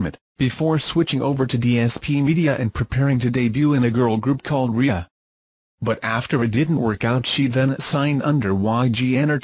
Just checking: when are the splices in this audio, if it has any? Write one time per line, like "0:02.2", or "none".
0:01.7